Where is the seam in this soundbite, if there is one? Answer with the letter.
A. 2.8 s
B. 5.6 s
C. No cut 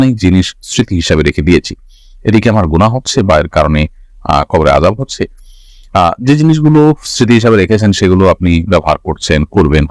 C